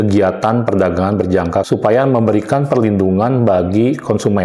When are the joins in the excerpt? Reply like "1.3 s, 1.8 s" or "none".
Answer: 1.7 s